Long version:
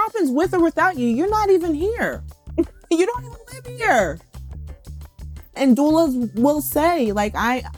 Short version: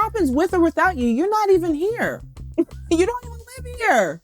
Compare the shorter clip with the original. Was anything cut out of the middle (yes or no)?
no